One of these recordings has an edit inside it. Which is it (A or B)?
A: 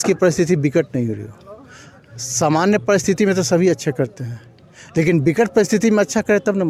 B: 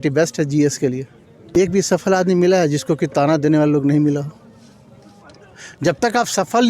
B